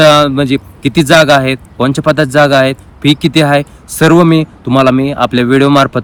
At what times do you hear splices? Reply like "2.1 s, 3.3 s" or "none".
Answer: none